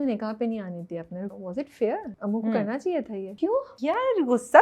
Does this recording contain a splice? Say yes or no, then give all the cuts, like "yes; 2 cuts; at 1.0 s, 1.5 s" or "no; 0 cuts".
yes; 3 cuts; at 1.3 s, 2.1 s, 3.3 s